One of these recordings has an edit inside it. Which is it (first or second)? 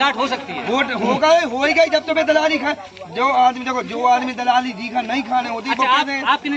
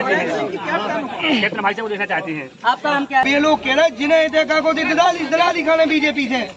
second